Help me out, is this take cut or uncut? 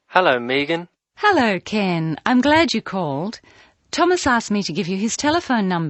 uncut